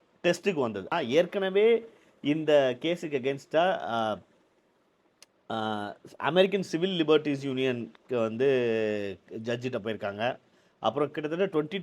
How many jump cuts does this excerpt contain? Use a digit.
1